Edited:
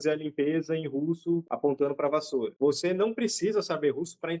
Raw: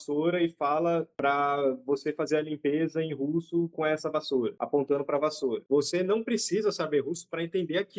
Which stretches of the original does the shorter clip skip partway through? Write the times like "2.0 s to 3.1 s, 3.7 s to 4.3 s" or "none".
3.7 s to 4.6 s